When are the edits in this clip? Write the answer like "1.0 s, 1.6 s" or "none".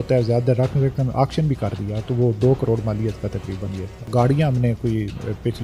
4.1 s